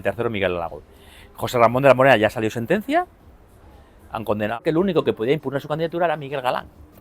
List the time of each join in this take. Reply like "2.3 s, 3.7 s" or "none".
4.6 s

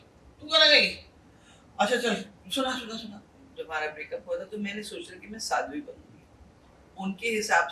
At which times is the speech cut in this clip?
3.3 s, 6.8 s

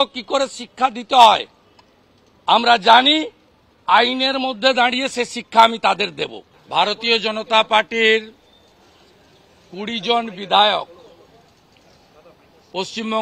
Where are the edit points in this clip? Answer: 6.5 s

